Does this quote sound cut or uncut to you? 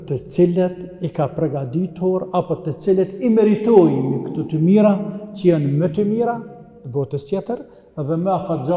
uncut